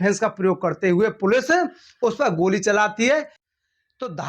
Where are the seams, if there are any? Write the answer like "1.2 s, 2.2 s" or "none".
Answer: 3.3 s